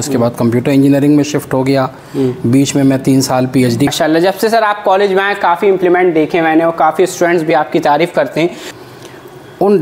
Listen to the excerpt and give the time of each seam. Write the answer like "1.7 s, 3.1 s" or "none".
3.9 s, 8.7 s